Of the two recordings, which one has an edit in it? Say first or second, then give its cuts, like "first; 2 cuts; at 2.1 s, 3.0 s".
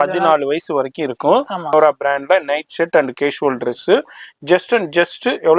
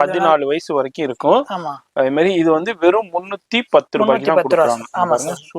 first; 1 cut; at 1.7 s